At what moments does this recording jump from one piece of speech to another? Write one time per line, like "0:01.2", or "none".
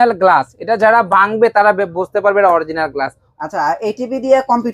0:03.2